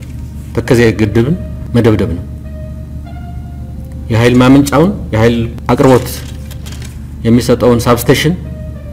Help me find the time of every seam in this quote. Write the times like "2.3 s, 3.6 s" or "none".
1.5 s, 5.5 s